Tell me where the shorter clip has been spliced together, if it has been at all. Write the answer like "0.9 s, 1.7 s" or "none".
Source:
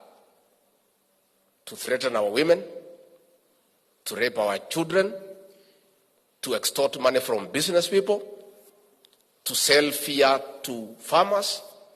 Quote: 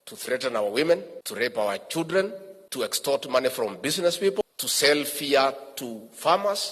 1.2 s, 3.0 s, 4.4 s